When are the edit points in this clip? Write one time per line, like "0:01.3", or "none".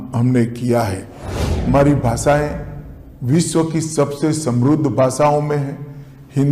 0:01.6